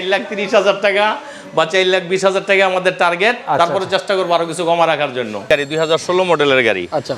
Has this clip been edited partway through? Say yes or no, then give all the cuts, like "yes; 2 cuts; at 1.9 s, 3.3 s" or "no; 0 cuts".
yes; 1 cut; at 5.4 s